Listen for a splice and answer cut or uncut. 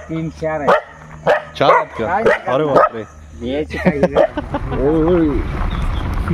cut